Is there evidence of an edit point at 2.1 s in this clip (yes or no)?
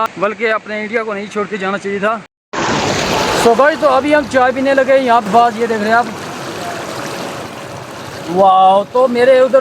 yes